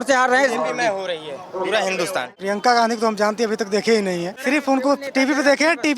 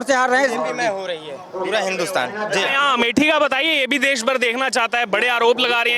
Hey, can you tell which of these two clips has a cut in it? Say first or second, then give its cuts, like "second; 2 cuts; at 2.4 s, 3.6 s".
first; 2 cuts; at 2.4 s, 4.3 s